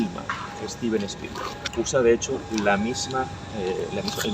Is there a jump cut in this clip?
yes; 1 cut; at 1.6 s

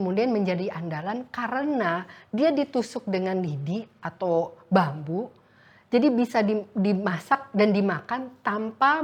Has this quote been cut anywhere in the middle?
no; 0 cuts

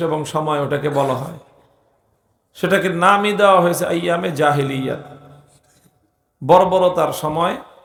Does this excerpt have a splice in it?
no; 0 cuts

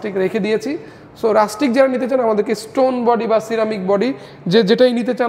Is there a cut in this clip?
no; 0 cuts

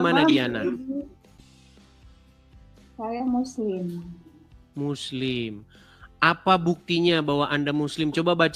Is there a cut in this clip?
no; 0 cuts

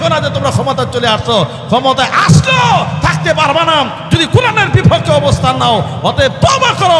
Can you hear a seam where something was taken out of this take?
no; 0 cuts

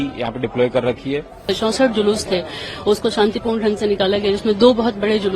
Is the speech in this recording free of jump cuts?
no; 1 cut; at 1.4 s

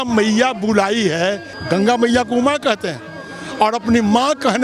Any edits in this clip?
yes; 1 cut; at 1.5 s

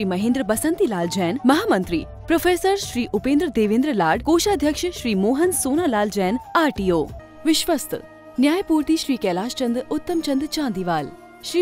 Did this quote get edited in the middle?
yes; 1 cut; at 7.2 s

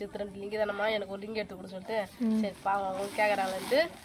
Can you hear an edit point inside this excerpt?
no; 0 cuts

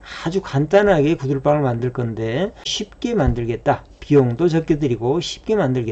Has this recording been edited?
yes; 1 cut; at 2.8 s

